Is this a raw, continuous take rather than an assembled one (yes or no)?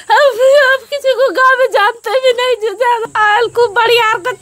no